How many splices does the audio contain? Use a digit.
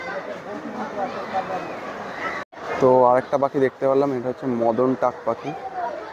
1